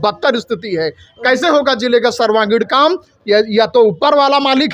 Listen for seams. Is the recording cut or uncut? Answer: uncut